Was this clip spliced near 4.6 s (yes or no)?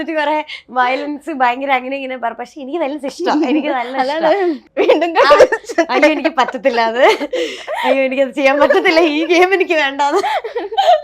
yes